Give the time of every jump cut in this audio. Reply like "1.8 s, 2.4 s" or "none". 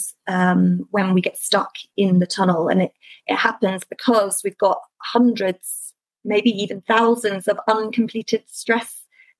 none